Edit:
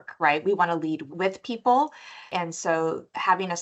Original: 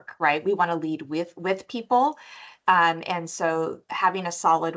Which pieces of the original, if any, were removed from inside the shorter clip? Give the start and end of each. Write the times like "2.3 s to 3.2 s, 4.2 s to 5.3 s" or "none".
1.1 s to 1.3 s, 2.5 s to 3.0 s